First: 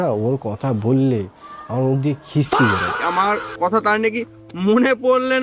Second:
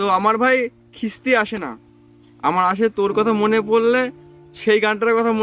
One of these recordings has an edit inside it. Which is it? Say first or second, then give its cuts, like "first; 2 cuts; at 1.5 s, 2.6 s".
first; 1 cut; at 2.9 s